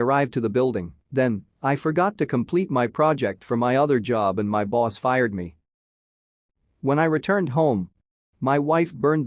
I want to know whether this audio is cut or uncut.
cut